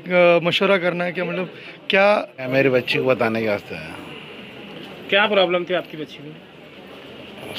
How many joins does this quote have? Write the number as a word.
one